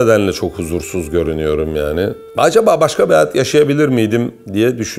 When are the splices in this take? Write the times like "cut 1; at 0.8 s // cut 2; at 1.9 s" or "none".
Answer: none